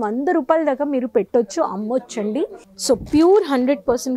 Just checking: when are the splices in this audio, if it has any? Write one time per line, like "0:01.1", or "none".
0:02.7